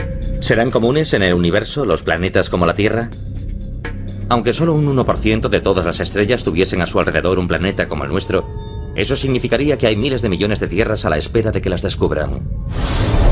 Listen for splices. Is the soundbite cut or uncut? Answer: uncut